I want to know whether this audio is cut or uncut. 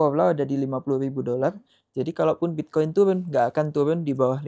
uncut